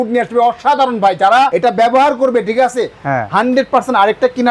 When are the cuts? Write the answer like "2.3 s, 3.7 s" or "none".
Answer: 1.5 s